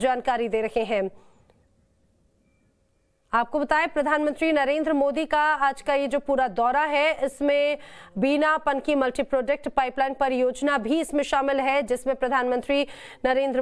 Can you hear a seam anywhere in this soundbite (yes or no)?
no